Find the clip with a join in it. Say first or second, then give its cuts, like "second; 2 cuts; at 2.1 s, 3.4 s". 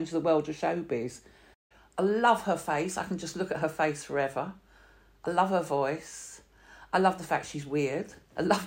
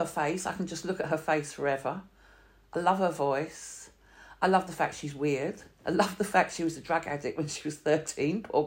first; 1 cut; at 1.6 s